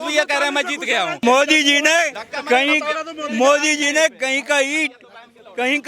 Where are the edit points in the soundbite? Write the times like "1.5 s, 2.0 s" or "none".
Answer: 1.2 s